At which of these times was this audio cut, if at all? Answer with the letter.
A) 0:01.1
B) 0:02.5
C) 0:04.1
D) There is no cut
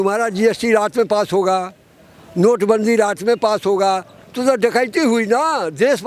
D